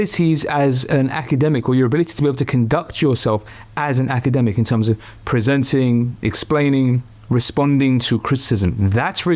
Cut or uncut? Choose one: uncut